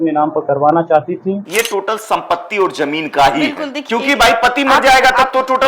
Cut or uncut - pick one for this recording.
cut